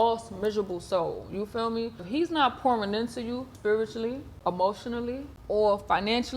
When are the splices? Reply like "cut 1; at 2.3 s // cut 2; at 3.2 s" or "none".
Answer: cut 1; at 2.1 s // cut 2; at 3.5 s // cut 3; at 4.3 s // cut 4; at 5.3 s